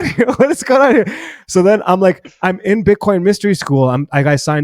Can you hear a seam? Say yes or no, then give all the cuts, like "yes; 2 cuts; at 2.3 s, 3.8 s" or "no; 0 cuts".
no; 0 cuts